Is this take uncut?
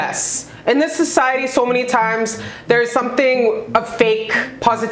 yes; 0 cuts

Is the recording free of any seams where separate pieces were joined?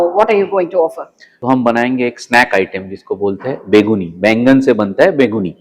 no; 1 cut; at 1.3 s

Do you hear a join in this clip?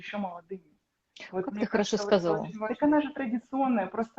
yes; 1 cut; at 2.6 s

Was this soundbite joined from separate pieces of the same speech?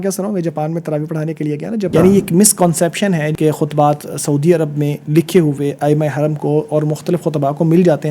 yes; 2 cuts; at 1.9 s, 3.3 s

